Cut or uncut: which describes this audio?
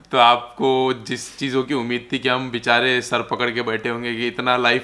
uncut